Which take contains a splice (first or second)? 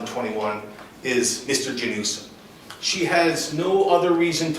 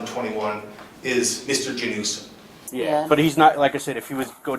second